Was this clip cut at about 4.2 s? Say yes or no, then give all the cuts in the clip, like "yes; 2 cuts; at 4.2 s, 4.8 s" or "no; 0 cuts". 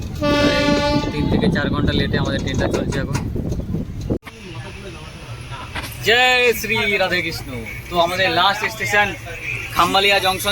yes; 1 cut; at 4.2 s